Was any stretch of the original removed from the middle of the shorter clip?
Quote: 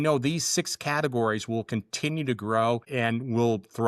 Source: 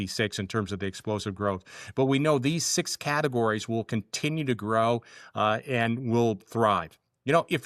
yes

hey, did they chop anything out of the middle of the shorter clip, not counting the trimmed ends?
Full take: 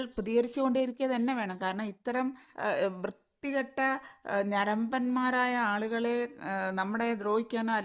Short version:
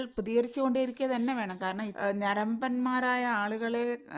yes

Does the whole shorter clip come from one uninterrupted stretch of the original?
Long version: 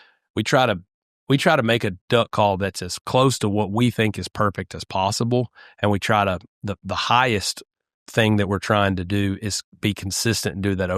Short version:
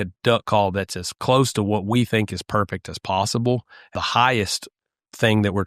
no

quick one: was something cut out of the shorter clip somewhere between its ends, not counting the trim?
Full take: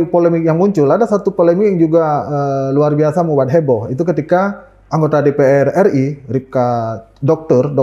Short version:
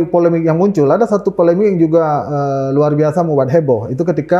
no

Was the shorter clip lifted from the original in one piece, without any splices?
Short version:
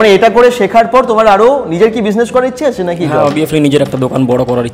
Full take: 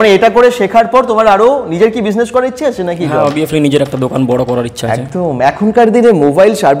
yes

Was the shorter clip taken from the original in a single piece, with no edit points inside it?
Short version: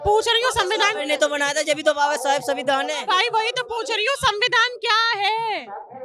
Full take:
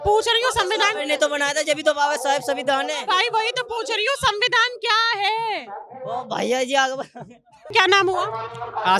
yes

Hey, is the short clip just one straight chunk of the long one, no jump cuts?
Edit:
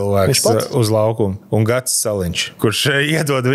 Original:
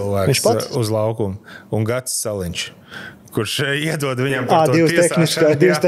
no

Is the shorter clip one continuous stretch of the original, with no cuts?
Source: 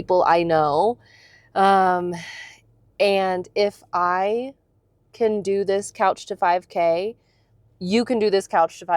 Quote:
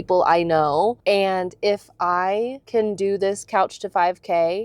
no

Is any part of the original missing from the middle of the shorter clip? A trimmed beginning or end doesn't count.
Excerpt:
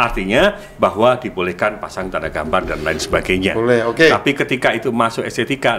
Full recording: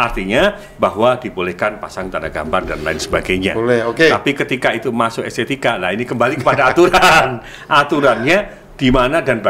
no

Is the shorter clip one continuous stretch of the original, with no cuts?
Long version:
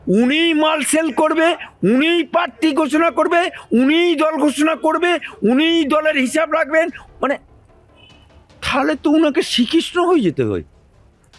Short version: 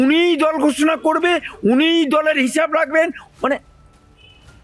yes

